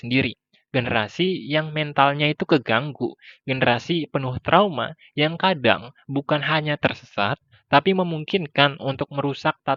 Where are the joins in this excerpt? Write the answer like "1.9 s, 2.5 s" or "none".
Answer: none